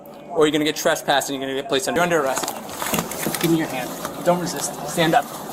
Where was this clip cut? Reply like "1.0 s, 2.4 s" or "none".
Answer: 1.9 s